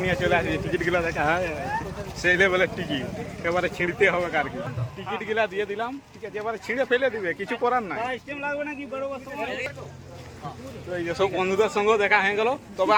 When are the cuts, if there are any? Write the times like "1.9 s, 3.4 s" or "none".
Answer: none